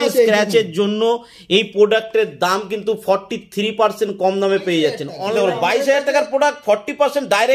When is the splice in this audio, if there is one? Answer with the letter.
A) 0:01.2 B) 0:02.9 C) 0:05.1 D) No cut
C